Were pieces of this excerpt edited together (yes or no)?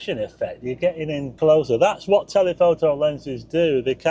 yes